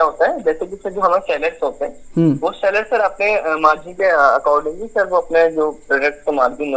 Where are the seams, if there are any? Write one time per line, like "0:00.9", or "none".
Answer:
none